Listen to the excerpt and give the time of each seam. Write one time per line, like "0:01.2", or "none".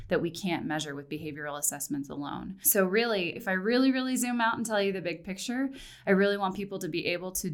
0:02.6
0:03.4